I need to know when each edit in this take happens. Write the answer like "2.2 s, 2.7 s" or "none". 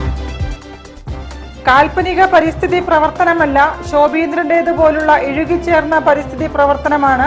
1.2 s